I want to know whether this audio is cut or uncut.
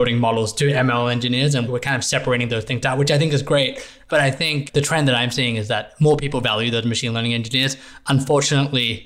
uncut